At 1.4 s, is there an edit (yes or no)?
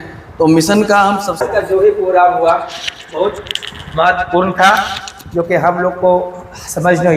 yes